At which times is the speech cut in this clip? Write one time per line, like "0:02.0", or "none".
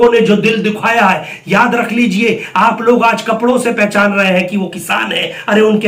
none